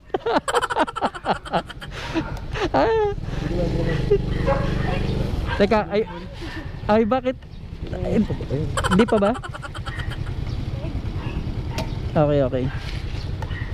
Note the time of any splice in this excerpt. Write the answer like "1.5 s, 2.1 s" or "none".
none